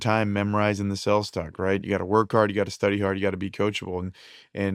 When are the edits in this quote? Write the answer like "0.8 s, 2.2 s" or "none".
none